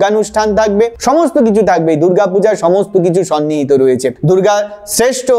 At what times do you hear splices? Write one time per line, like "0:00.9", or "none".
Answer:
0:04.1